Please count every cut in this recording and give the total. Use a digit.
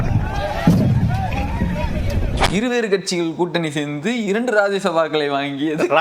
1